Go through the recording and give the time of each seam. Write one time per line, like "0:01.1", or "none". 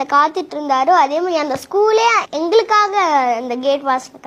none